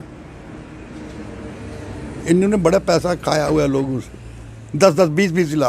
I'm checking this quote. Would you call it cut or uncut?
uncut